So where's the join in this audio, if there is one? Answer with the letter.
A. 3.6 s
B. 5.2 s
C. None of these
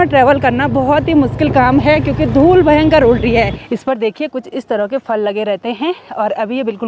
A